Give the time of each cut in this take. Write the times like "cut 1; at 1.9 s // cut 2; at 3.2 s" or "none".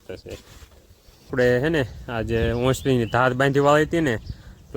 cut 1; at 1.3 s